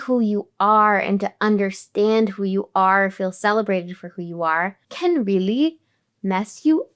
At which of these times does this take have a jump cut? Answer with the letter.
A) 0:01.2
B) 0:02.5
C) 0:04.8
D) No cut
C